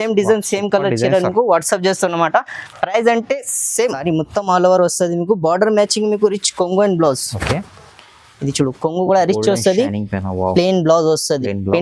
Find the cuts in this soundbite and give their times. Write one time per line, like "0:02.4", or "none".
0:04.0